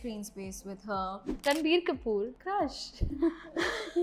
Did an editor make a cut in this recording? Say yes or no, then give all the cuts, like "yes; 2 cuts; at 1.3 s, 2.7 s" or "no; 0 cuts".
yes; 2 cuts; at 1.3 s, 2.4 s